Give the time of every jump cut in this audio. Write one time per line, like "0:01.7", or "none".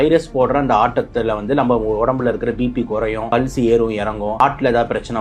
0:03.3
0:04.4